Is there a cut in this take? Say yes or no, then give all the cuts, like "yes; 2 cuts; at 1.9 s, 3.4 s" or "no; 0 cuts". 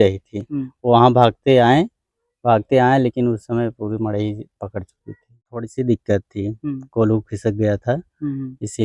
yes; 1 cut; at 5.7 s